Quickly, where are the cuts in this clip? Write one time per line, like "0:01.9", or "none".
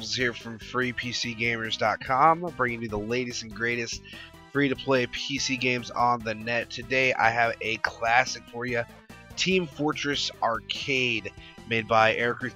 0:11.1